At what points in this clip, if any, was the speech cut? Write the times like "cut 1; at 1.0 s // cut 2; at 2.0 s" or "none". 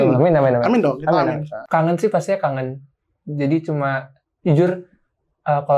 cut 1; at 1.5 s